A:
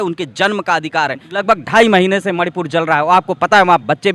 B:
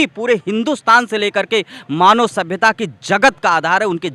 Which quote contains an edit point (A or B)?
A